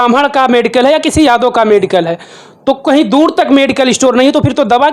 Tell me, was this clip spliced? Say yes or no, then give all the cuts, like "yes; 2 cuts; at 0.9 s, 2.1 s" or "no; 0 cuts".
no; 0 cuts